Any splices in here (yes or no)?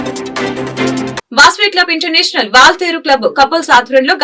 no